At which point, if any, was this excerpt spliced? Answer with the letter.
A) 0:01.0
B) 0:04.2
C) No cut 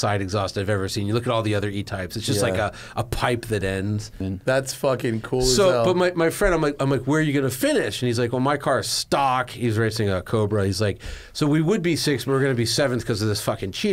B